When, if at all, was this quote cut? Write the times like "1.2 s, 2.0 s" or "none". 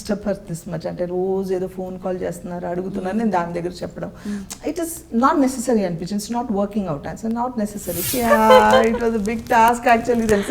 8.1 s